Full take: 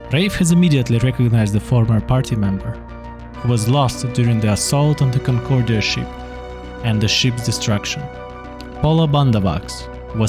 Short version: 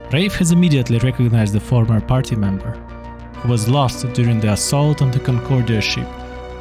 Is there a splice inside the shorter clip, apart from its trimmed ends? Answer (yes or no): no